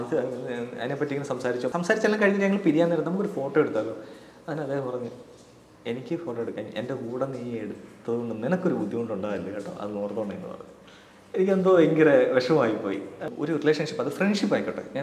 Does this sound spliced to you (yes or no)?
yes